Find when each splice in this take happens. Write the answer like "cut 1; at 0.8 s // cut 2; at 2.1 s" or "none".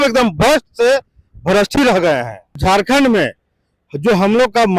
cut 1; at 2.6 s